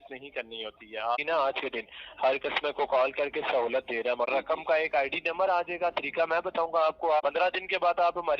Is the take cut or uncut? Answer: cut